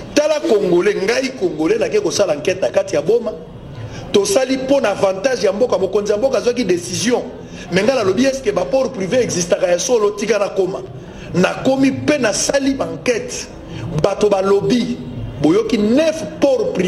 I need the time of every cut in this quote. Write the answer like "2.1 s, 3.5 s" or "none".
none